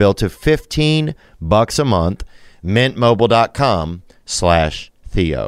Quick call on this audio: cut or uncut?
uncut